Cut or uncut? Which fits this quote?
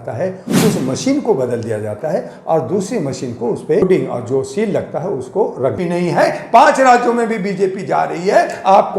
cut